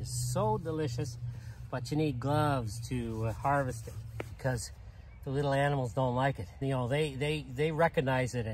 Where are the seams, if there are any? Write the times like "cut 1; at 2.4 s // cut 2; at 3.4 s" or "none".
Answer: cut 1; at 4.4 s // cut 2; at 6.6 s